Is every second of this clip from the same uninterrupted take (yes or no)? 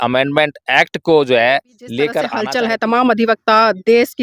no